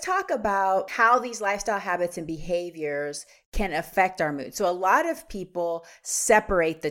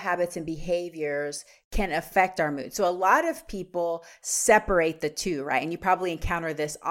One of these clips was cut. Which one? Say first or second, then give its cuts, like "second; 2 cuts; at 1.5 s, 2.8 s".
first; 1 cut; at 0.9 s